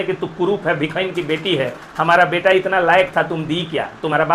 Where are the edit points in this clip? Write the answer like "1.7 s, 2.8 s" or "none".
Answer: none

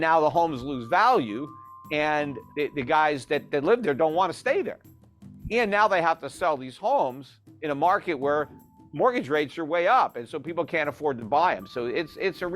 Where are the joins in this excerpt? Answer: 2.4 s

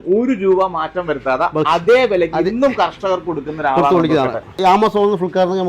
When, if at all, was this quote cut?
4.6 s

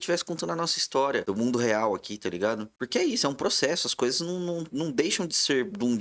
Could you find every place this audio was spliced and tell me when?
1.2 s, 2.7 s

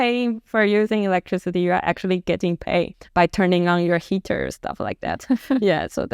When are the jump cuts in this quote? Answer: 3.0 s

